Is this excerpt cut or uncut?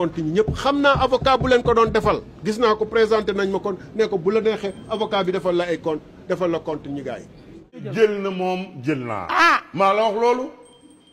cut